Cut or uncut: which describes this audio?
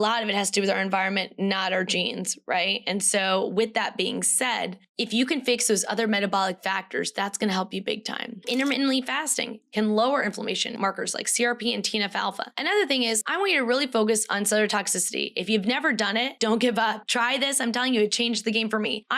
cut